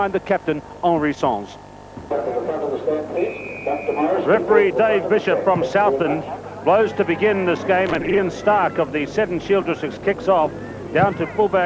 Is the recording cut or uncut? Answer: cut